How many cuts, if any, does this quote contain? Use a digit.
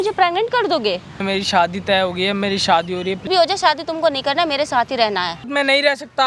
3